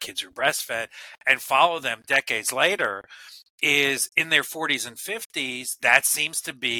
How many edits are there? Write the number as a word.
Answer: zero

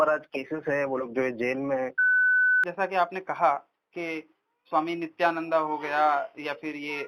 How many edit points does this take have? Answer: one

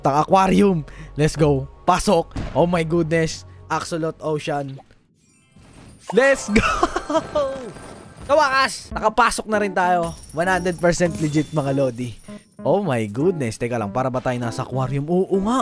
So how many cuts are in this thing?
zero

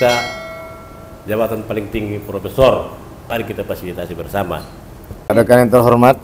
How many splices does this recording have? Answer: two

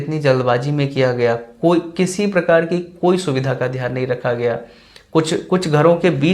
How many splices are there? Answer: zero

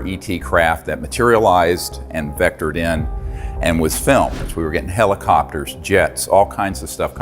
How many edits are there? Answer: one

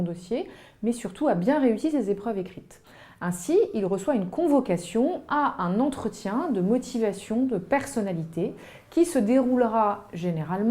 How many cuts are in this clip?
one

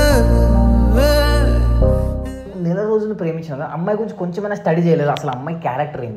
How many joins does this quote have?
one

